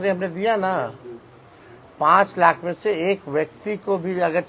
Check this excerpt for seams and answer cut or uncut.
uncut